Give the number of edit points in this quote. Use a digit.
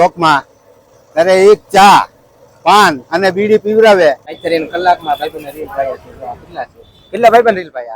1